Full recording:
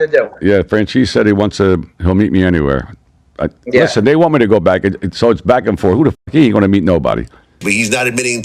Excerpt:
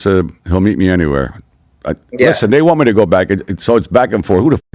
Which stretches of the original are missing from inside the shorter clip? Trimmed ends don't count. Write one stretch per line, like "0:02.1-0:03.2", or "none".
none